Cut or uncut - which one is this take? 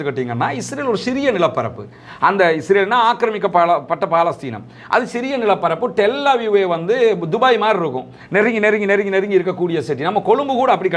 uncut